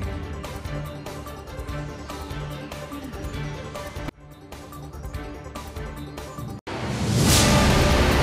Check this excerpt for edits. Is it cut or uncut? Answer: uncut